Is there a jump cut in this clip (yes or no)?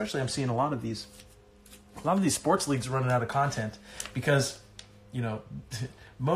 no